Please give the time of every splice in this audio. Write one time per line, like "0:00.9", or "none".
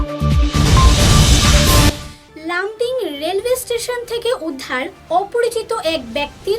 0:01.9